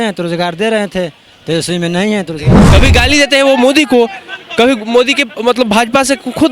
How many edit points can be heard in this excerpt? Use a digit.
1